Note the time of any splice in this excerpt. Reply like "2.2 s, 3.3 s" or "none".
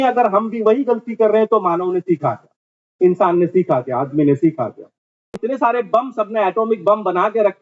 5.4 s